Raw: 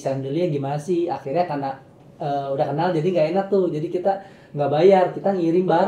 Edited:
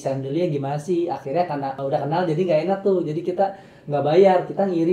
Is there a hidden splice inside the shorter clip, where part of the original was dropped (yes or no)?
yes